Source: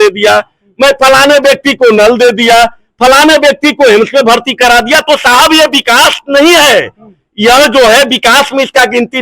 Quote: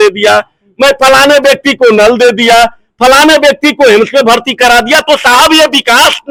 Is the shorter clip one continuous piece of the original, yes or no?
yes